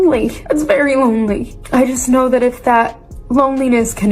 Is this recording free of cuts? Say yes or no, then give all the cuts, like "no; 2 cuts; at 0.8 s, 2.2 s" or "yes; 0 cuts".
yes; 0 cuts